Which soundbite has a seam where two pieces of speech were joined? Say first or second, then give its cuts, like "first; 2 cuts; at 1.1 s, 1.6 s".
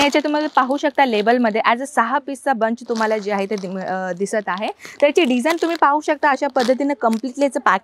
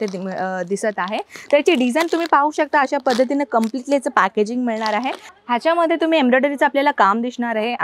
second; 1 cut; at 5.3 s